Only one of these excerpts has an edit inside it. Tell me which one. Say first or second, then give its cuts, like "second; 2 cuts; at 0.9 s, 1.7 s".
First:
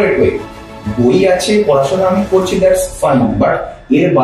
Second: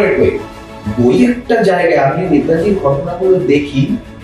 second; 1 cut; at 1.2 s